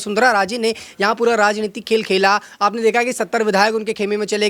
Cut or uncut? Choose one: uncut